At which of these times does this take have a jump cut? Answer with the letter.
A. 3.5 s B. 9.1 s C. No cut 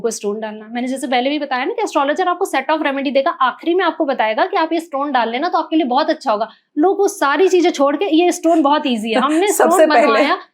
C